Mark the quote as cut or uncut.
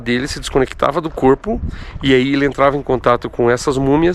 uncut